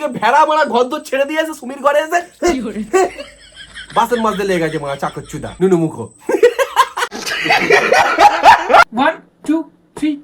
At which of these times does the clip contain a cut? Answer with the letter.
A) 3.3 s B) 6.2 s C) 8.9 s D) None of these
C